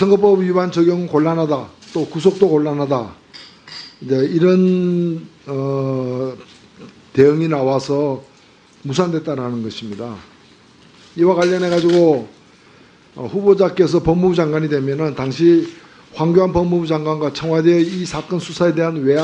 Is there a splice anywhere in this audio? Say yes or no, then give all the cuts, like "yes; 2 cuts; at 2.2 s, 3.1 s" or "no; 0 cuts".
no; 0 cuts